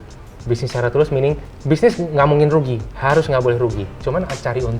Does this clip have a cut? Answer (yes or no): yes